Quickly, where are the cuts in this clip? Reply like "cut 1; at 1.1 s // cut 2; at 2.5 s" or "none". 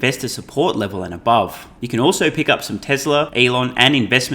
cut 1; at 1.7 s // cut 2; at 3.3 s